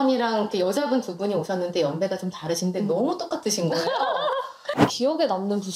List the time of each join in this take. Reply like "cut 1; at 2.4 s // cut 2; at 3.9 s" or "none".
cut 1; at 4.7 s